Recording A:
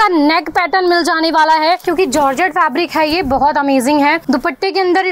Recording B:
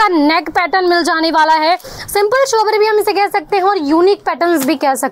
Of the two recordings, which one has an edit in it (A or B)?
A